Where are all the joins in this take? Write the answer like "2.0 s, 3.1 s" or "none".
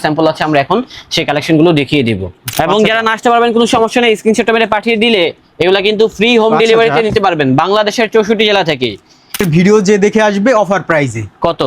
2.5 s, 9.4 s